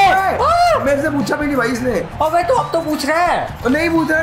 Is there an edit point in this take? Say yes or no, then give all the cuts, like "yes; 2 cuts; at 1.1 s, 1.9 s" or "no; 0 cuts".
no; 0 cuts